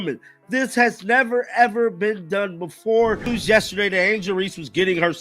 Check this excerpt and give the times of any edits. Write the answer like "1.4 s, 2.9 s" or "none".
3.2 s